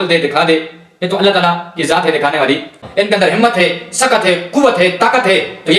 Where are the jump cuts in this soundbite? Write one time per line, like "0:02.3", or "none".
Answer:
0:02.8

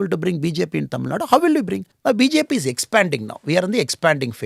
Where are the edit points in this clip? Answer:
0:01.9

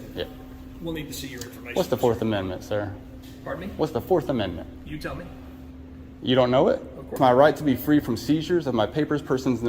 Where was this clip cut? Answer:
0:07.2

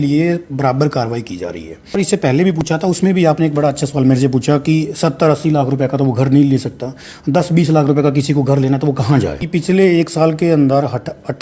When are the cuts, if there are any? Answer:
0:01.9
0:09.4

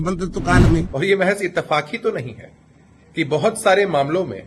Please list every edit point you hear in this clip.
0:00.9

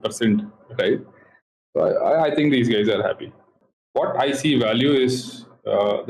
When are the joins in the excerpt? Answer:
0:03.5

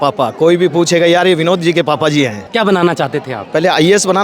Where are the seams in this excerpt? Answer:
0:02.4

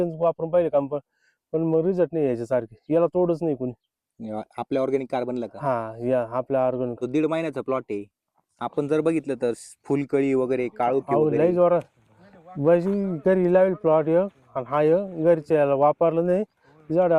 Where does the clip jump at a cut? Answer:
0:06.9

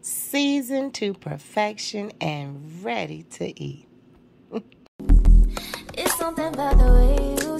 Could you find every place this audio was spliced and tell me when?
0:04.8

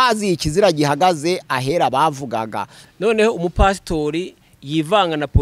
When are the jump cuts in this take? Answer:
0:02.7

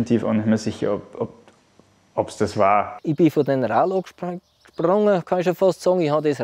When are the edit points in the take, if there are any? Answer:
0:02.9

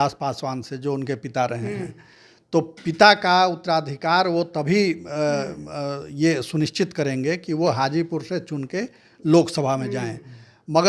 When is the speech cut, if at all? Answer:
none

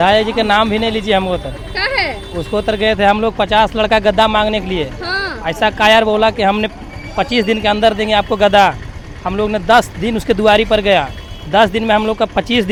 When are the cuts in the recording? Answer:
none

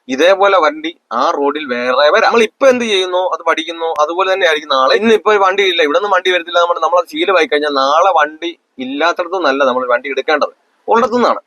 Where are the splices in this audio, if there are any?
0:02.3
0:05.0

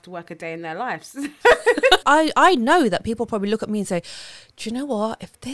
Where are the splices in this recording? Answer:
0:02.0

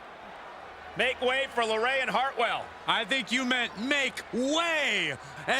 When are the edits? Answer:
0:01.0

